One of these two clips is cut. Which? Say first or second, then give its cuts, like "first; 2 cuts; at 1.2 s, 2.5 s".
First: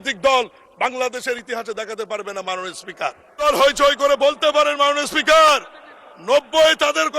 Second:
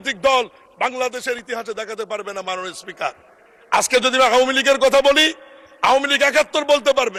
first; 1 cut; at 3.4 s